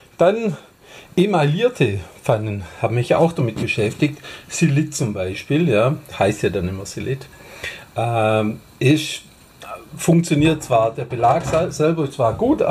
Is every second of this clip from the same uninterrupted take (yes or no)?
yes